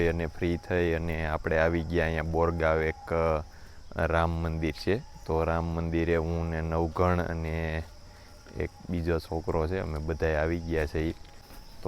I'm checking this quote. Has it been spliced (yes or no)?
no